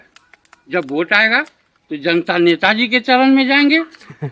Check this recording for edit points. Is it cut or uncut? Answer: uncut